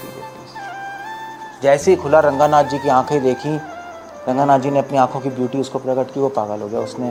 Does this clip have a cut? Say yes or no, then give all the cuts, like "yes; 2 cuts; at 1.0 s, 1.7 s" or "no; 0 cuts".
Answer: no; 0 cuts